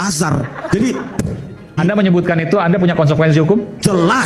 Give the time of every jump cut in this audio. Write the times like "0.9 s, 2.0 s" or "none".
1.8 s